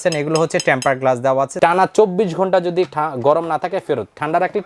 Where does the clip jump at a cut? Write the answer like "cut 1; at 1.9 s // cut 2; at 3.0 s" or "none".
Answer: cut 1; at 1.5 s